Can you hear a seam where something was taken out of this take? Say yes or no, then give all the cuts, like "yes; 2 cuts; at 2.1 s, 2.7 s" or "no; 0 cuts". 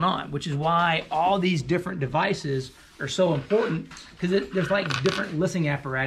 no; 0 cuts